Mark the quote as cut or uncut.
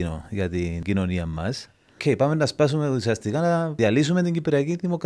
cut